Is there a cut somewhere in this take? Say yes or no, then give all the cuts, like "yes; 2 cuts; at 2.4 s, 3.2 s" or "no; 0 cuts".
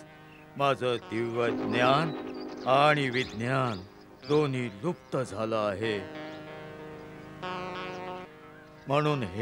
yes; 1 cut; at 8.3 s